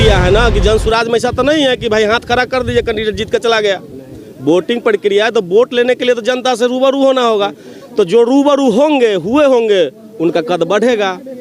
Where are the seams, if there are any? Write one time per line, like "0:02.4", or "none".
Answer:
none